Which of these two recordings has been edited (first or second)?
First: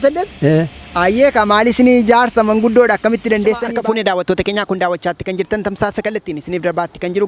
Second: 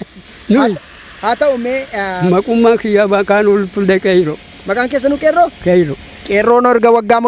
first